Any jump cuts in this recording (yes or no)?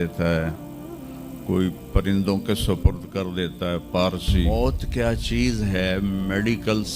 yes